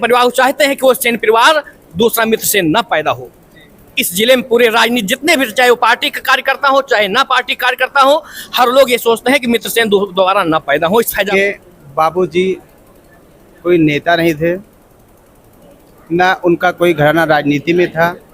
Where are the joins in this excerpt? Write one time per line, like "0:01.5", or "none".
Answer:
0:11.3